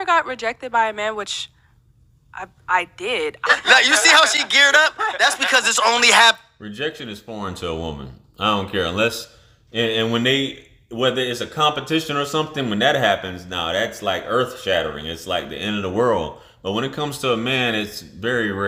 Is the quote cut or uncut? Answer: uncut